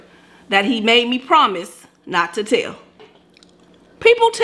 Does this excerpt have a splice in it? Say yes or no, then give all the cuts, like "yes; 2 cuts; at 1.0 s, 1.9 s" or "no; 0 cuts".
yes; 1 cut; at 3.0 s